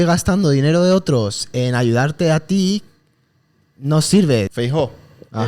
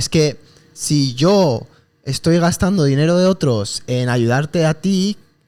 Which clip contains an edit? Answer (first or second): first